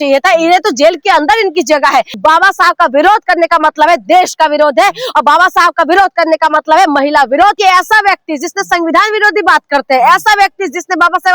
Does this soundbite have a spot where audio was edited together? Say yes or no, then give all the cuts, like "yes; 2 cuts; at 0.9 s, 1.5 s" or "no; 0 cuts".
yes; 2 cuts; at 2.1 s, 7.6 s